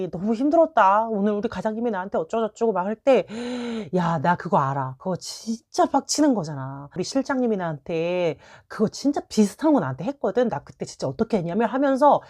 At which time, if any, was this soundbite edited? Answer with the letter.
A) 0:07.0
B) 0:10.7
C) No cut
A